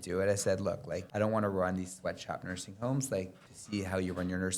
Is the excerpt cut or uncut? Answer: cut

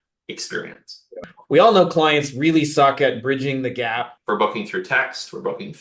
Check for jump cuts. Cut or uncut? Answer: cut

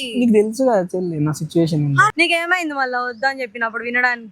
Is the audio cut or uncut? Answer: cut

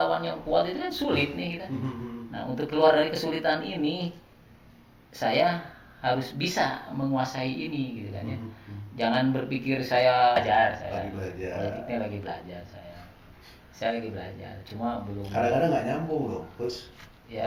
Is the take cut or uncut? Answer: cut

